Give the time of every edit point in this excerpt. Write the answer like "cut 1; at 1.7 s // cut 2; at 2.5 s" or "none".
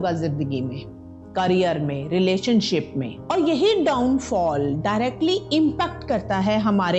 cut 1; at 3.1 s